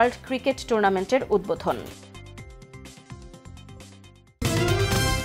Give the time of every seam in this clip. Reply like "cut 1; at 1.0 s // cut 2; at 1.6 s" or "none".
cut 1; at 4.3 s

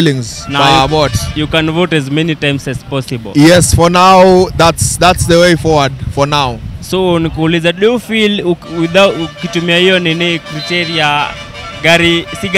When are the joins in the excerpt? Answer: none

